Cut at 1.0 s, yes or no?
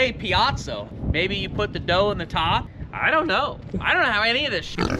yes